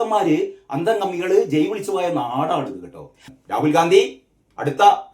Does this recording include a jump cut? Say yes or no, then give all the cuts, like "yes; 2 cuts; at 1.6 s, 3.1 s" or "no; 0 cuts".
yes; 1 cut; at 3.2 s